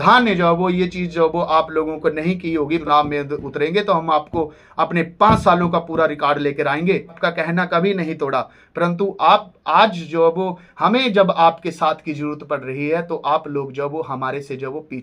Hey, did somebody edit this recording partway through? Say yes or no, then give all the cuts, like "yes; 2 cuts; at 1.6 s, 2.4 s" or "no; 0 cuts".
yes; 2 cuts; at 2.8 s, 7.2 s